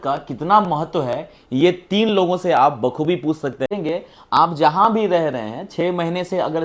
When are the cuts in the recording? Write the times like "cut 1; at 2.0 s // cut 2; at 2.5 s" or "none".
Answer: cut 1; at 3.7 s